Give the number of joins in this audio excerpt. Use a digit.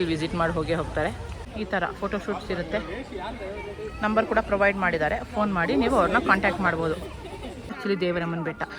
2